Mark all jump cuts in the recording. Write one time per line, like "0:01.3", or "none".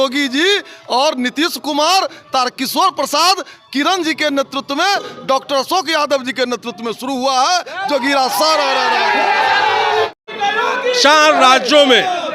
0:10.2